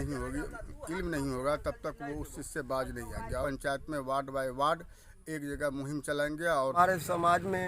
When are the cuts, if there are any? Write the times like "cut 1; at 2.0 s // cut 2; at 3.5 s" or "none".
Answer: cut 1; at 3.4 s // cut 2; at 6.8 s